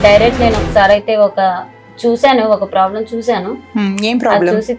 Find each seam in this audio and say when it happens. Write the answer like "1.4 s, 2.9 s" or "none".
none